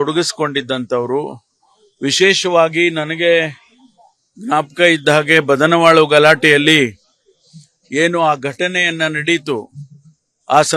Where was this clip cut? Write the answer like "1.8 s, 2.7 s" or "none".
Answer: 3.8 s